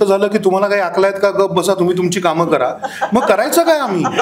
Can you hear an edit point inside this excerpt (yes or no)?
no